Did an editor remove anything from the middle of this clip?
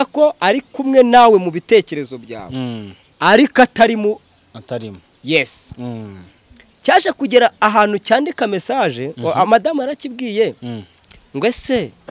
no; 0 cuts

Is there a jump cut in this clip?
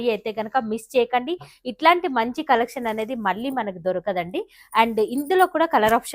no; 0 cuts

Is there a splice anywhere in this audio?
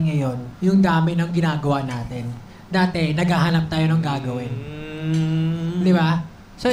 yes; 1 cut; at 5.6 s

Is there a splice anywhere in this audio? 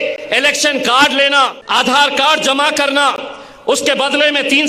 yes; 1 cut; at 1.6 s

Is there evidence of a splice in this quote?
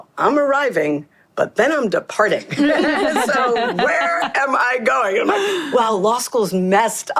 no; 0 cuts

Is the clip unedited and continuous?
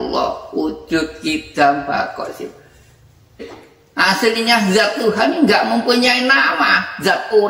yes; 0 cuts

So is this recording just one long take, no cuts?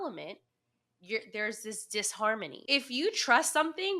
no; 1 cut; at 2.6 s

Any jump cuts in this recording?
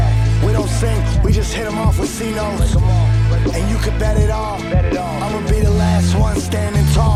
no; 0 cuts

